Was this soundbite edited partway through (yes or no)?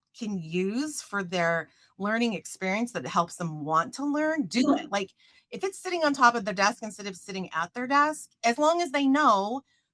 no